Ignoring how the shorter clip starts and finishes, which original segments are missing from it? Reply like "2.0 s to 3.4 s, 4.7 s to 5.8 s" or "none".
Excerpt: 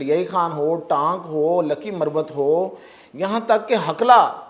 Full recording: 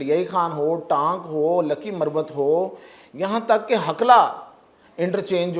none